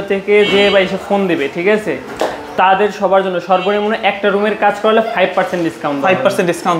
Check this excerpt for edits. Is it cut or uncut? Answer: uncut